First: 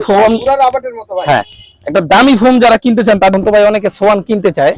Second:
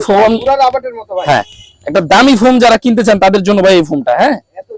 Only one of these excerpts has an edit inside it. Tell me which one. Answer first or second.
first